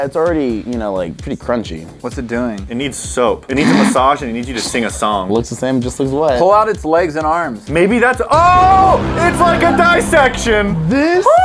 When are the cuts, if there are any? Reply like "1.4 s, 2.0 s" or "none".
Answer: 1.9 s